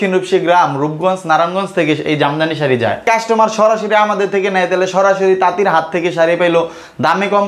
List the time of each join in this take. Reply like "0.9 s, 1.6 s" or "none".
3.1 s